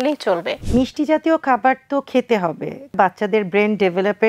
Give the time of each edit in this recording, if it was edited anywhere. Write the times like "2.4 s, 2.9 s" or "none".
2.9 s